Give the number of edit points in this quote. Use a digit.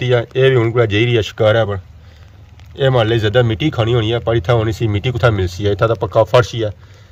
0